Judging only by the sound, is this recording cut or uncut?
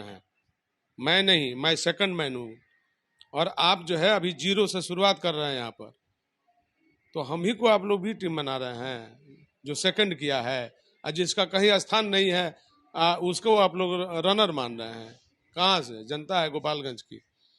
uncut